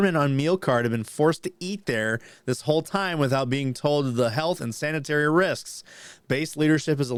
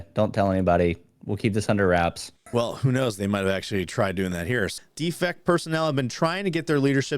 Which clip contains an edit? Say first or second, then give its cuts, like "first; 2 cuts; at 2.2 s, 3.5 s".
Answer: second; 2 cuts; at 2.5 s, 4.7 s